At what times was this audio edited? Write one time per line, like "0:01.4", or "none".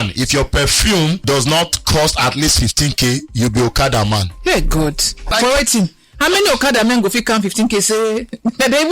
0:01.2
0:05.3